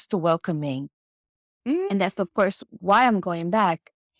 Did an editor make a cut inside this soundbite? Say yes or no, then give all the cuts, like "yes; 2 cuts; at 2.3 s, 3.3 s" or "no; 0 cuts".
no; 0 cuts